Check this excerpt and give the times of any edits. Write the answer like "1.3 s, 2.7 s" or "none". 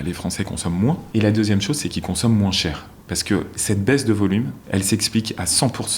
1.0 s, 4.6 s